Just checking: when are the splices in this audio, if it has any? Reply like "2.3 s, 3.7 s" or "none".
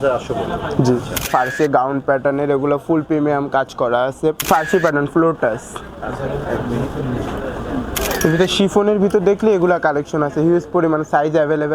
1.3 s, 4.4 s, 8.0 s